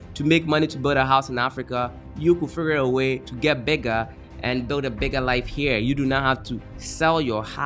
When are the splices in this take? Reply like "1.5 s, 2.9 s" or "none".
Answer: 3.3 s, 4.2 s